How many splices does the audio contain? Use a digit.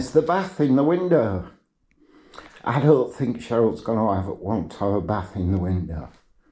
0